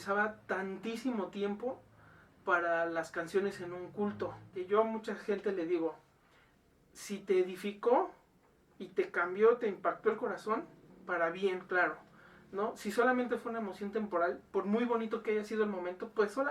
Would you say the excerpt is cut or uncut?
cut